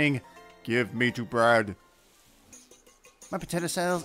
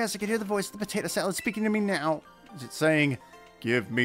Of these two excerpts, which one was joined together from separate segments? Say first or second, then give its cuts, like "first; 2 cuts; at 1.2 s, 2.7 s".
first; 1 cut; at 2.6 s